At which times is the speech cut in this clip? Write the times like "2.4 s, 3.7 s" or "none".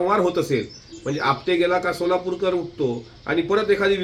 none